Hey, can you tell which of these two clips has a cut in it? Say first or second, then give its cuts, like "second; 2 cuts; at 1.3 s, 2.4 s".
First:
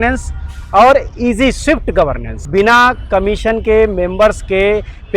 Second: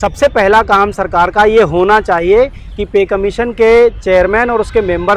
first; 1 cut; at 2.3 s